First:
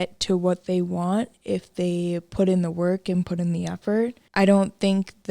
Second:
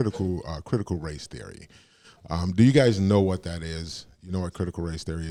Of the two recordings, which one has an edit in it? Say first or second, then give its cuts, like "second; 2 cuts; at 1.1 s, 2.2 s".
first; 1 cut; at 4.2 s